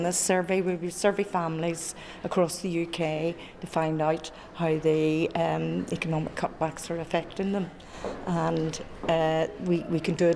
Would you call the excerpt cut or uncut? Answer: uncut